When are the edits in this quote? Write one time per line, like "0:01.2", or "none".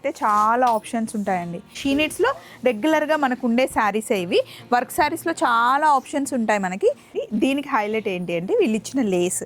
0:01.7
0:07.1